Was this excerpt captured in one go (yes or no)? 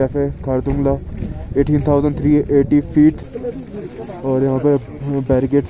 yes